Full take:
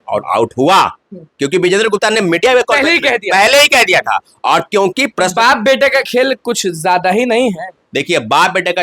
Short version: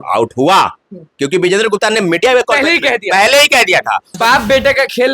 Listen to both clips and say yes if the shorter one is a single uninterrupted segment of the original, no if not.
no